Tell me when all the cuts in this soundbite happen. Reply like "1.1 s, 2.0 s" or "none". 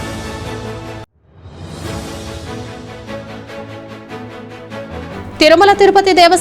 1.1 s